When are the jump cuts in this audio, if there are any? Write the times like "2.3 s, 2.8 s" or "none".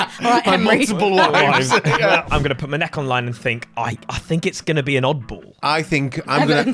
2.3 s